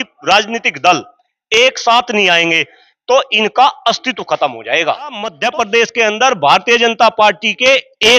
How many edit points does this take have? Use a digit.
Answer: 1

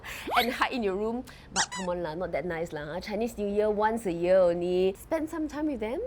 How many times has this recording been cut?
1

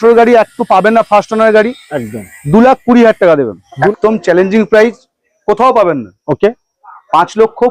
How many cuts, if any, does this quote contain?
1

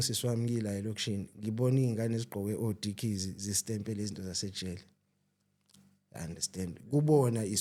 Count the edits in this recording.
0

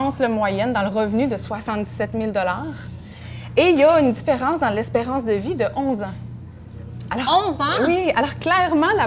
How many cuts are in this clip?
0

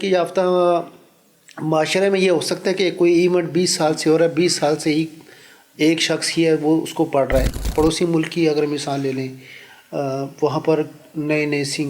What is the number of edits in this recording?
1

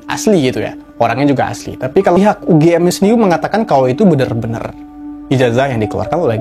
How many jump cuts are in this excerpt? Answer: 1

